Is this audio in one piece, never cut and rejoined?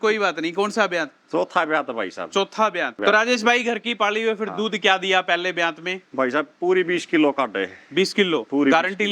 no; 1 cut; at 3.0 s

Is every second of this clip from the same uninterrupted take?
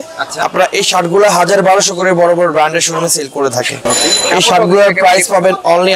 yes; 0 cuts

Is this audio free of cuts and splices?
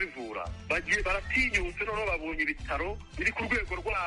no; 1 cut; at 3.1 s

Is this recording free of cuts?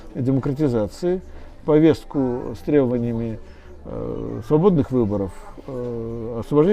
yes; 0 cuts

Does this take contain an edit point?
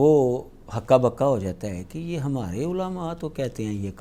no; 0 cuts

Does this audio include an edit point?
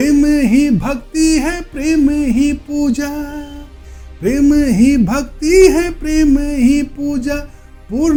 no; 0 cuts

